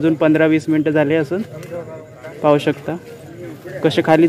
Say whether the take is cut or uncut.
uncut